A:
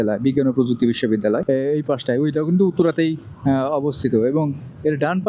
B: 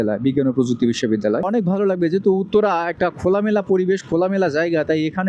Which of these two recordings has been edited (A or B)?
B